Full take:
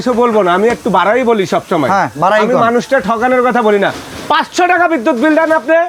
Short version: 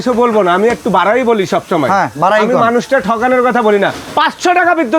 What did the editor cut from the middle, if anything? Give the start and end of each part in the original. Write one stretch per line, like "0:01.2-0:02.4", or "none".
0:04.0-0:04.2